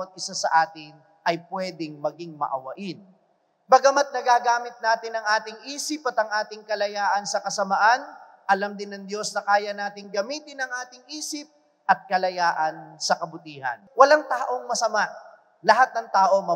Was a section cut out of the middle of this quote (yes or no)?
yes